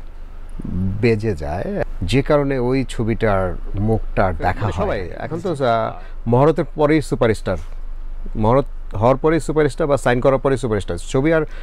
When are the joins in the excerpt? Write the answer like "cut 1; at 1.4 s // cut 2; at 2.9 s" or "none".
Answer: cut 1; at 1.8 s // cut 2; at 4.8 s